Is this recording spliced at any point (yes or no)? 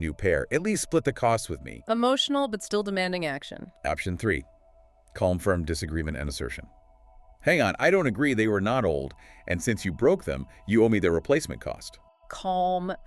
no